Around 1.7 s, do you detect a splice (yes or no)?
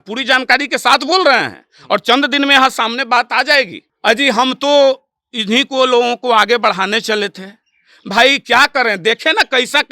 no